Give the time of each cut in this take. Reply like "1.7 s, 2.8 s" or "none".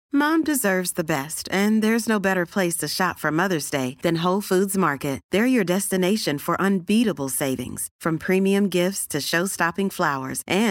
none